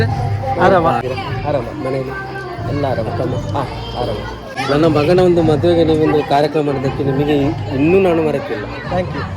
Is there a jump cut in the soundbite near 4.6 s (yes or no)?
yes